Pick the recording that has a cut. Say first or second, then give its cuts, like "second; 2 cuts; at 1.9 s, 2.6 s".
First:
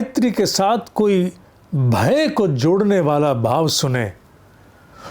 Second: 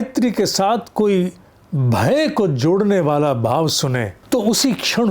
second; 1 cut; at 4.2 s